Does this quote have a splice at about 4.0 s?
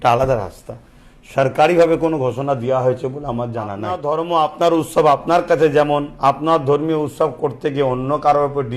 yes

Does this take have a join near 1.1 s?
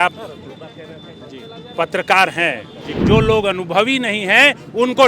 no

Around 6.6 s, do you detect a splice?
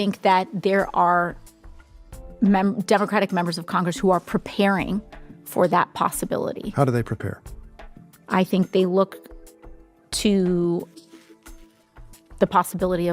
yes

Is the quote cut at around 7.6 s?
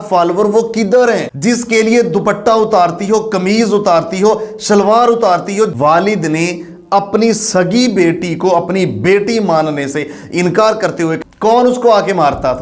no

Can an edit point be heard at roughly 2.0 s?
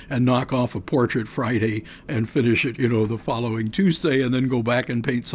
yes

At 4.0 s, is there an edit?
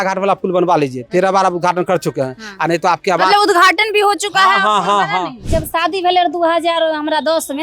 no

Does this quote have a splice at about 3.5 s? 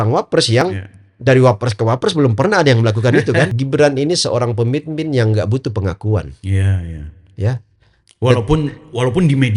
yes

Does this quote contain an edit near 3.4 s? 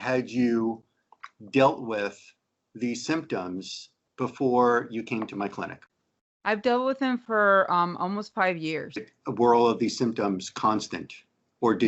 no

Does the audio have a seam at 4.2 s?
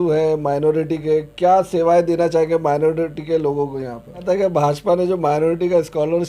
yes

